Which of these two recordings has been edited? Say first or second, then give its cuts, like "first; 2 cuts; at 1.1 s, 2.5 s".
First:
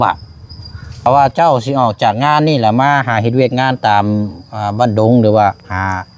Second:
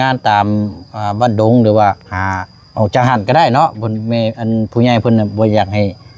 first; 1 cut; at 1.1 s